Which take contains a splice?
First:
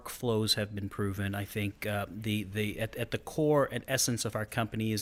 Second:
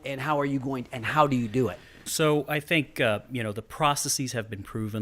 second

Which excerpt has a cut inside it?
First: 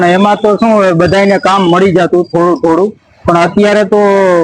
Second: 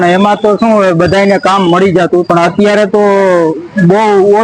second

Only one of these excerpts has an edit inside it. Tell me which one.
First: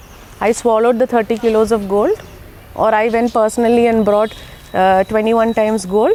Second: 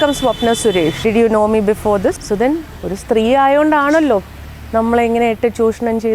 second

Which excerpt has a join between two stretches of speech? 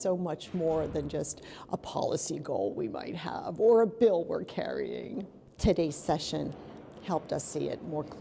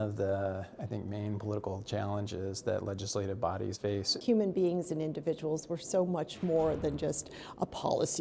second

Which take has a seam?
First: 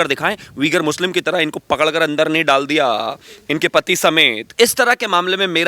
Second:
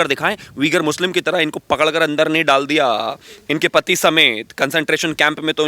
first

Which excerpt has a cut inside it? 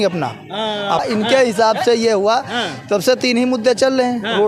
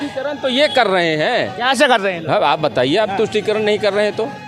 first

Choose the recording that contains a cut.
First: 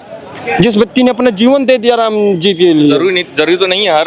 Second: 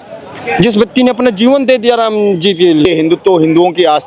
second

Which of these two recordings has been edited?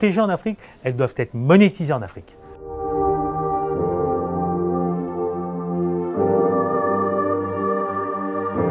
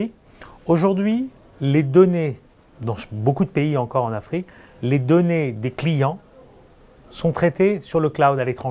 first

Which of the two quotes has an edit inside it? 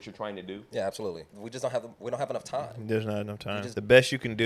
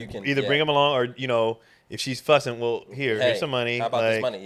first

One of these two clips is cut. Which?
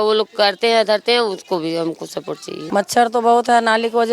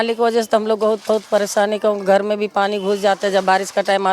first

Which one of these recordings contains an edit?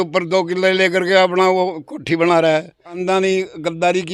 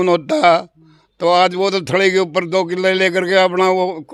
first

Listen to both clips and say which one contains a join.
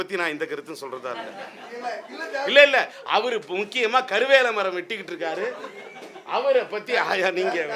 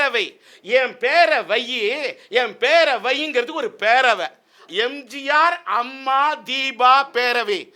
second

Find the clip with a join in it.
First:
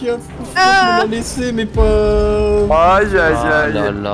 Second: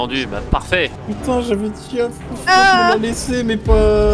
second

